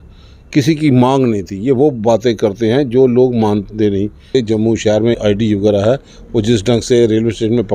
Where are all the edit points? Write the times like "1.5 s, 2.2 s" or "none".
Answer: 4.3 s